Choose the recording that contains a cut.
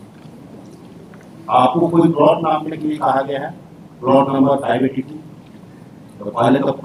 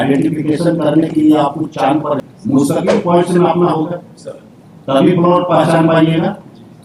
second; 1 cut; at 2.2 s

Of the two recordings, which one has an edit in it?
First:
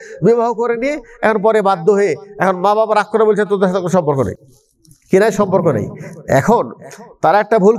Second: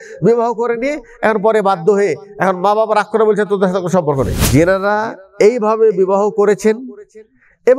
second; 1 cut; at 4.4 s

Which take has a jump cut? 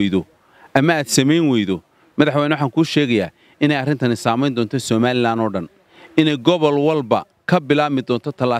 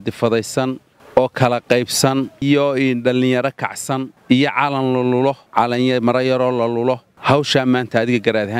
second; 5 cuts; at 0.9 s, 2.4 s, 4.1 s, 5.4 s, 7.1 s

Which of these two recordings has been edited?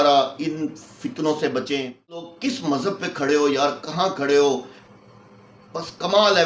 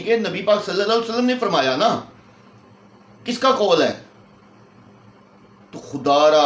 first; 1 cut; at 2.3 s

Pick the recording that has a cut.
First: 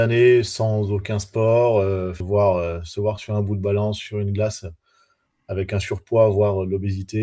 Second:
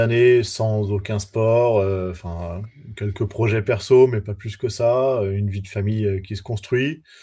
first; 1 cut; at 2.2 s

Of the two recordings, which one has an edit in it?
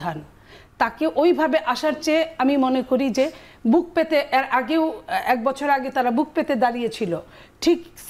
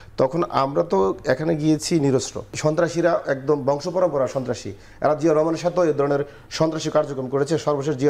second; 1 cut; at 2.5 s

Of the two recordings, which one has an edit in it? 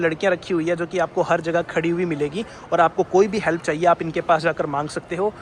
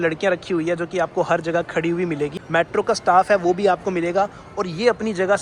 second; 1 cut; at 2.4 s

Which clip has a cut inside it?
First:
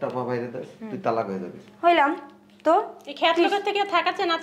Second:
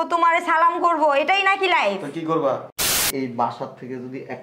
second; 1 cut; at 3.1 s

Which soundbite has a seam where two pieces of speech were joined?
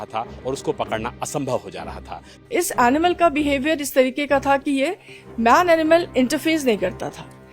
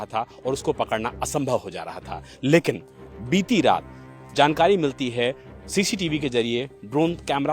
first; 1 cut; at 2.4 s

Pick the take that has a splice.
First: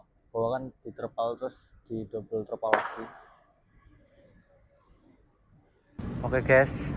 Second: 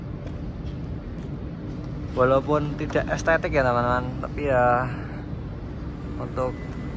first; 1 cut; at 6.0 s

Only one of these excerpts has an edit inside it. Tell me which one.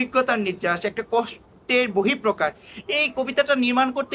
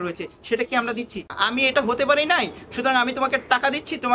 second; 1 cut; at 1.3 s

